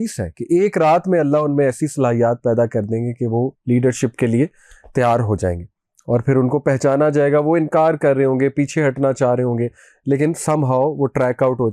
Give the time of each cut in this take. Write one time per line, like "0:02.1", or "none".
none